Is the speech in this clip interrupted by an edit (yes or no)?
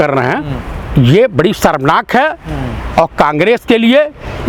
no